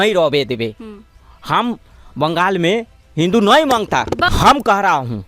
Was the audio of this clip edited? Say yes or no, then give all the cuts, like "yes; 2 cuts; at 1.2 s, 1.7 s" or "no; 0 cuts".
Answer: yes; 1 cut; at 4.2 s